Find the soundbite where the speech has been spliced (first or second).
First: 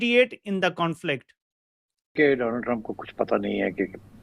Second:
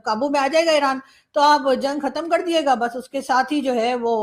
first